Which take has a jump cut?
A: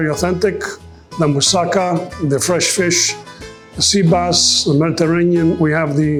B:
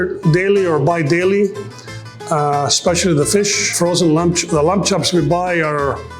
B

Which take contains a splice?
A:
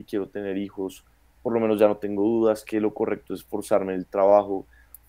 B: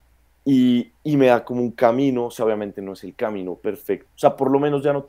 B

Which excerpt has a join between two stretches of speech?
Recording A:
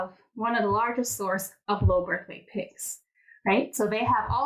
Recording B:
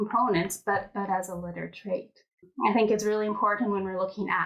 B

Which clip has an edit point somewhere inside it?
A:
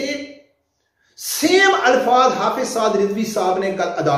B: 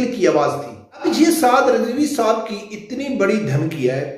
B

